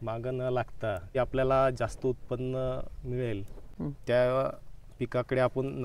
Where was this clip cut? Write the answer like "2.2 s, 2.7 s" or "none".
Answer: 1.2 s, 3.6 s